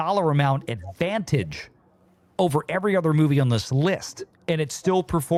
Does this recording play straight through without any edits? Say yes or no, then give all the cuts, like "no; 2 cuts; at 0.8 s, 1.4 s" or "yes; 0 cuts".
yes; 0 cuts